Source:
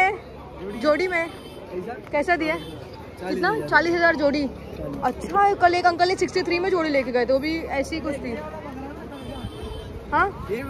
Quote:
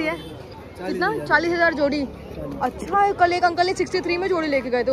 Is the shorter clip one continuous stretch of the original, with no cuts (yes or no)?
yes